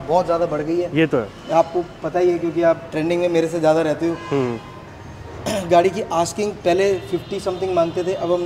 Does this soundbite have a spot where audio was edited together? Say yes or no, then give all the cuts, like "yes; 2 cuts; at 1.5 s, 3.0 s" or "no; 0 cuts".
no; 0 cuts